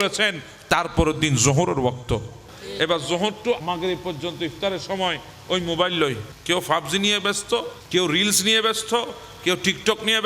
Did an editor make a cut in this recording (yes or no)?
yes